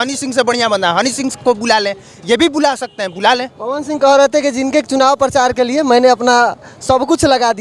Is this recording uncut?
yes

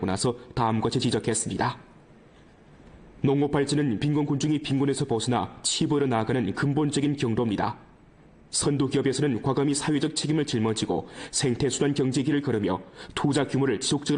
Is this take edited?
no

